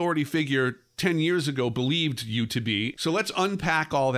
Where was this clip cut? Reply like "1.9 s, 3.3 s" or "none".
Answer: 2.9 s